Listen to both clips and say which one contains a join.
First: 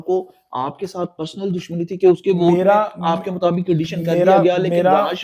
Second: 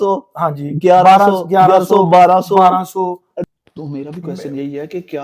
second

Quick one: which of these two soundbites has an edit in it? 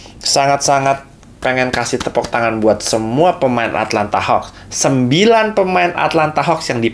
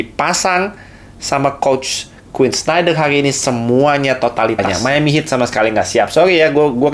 second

